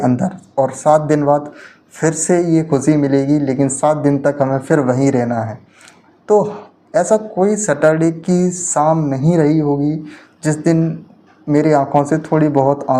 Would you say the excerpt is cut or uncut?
uncut